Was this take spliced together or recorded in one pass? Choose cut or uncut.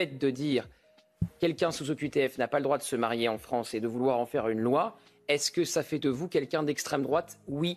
uncut